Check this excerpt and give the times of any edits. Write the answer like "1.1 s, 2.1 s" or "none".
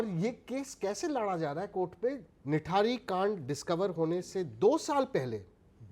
2.3 s